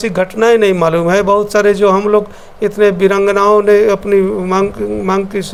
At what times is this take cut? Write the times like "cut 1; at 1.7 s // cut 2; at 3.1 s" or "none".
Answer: none